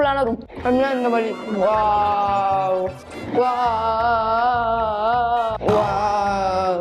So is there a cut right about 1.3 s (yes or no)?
no